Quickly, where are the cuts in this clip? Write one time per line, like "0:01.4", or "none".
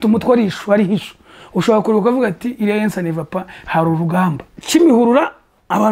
0:04.5